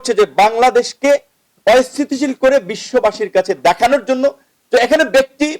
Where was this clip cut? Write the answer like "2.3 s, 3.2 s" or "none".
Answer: 4.5 s